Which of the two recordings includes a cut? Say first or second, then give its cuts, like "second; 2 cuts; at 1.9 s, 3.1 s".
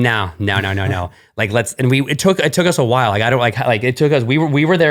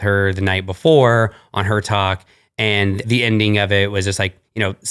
second; 1 cut; at 3.0 s